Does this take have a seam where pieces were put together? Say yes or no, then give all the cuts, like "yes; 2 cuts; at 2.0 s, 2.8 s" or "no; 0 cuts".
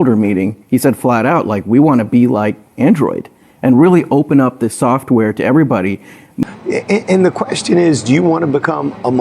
yes; 1 cut; at 6.4 s